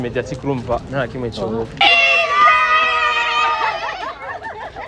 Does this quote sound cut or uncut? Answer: cut